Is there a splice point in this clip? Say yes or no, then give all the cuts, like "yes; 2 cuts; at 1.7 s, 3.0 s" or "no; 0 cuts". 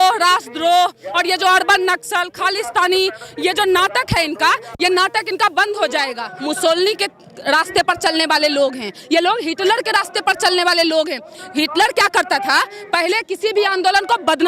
yes; 1 cut; at 6.3 s